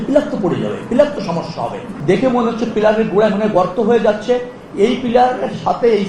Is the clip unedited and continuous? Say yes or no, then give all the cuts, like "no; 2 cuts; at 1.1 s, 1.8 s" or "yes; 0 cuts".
no; 1 cut; at 1.8 s